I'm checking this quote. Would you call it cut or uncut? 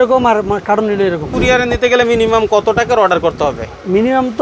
cut